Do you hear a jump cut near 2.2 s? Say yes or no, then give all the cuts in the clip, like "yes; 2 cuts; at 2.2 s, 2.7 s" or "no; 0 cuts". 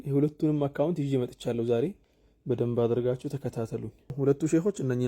no; 1 cut; at 4.1 s